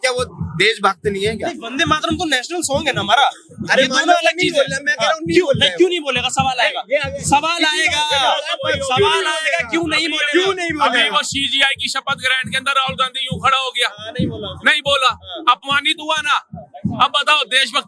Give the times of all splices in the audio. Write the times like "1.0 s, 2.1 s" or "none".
none